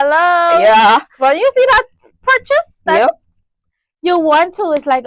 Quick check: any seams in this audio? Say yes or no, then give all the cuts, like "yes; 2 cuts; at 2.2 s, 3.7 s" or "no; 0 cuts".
no; 0 cuts